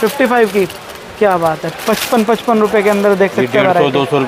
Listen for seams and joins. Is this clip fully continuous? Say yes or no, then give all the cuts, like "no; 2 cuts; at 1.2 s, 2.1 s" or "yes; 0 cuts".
yes; 0 cuts